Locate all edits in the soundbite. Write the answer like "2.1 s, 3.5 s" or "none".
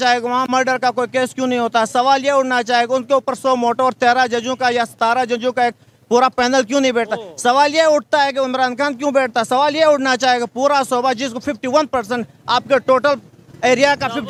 none